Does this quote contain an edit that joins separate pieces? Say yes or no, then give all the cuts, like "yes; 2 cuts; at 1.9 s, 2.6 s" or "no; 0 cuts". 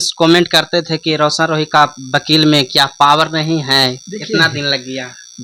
no; 0 cuts